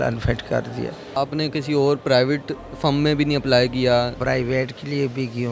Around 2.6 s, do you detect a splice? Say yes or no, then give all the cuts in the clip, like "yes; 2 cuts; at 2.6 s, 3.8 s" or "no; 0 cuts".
no; 2 cuts; at 1.0 s, 4.2 s